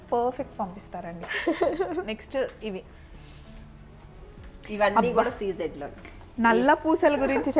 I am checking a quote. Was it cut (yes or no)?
no